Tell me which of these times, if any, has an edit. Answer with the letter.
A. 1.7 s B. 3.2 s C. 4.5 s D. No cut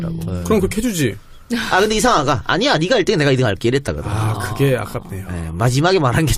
C